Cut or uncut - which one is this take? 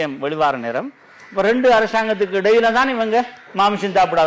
uncut